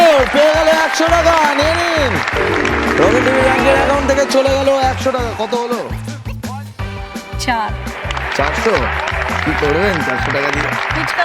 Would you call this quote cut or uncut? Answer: uncut